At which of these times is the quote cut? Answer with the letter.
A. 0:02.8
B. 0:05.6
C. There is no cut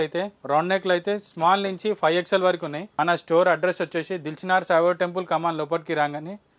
A